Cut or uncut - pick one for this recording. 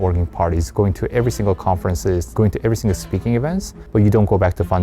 cut